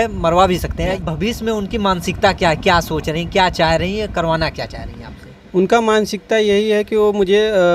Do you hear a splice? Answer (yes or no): yes